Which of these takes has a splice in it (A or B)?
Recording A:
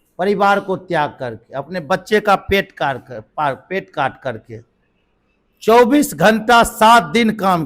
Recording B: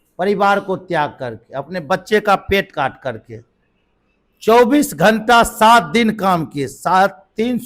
B